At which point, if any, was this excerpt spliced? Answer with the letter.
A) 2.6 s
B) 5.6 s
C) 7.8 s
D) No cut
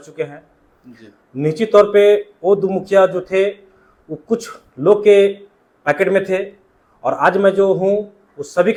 D